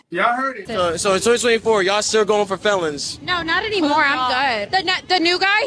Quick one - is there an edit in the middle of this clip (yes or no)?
no